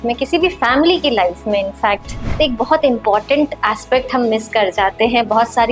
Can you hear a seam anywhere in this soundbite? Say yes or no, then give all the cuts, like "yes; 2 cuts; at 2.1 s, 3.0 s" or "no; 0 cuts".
yes; 1 cut; at 2.3 s